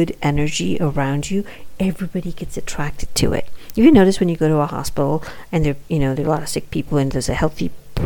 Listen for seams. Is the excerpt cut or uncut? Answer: uncut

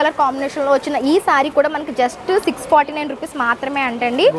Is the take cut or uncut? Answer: uncut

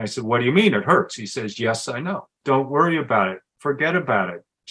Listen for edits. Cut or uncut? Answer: cut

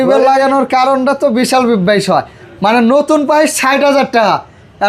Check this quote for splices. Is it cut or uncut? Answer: uncut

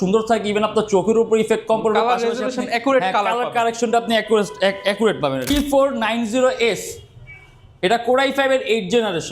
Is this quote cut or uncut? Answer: cut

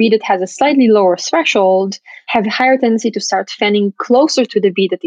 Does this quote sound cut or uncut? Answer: uncut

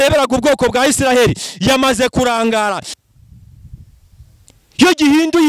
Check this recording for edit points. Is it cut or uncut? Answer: cut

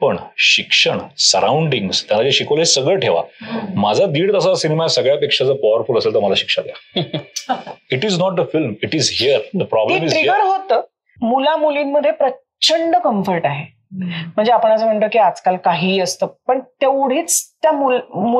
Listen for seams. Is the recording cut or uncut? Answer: cut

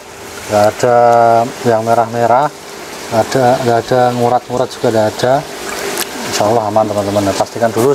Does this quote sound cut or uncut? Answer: uncut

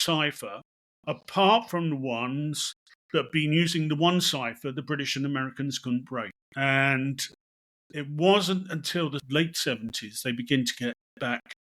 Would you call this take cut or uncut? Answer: cut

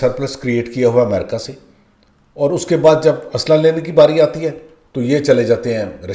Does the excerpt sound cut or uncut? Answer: uncut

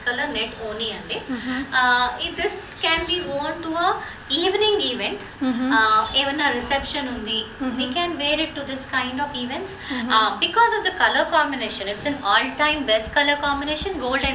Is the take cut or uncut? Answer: uncut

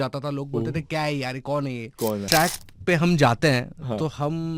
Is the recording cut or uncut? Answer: cut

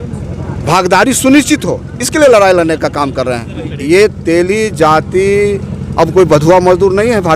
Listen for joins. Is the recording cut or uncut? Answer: cut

